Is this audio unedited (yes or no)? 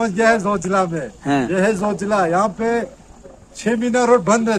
yes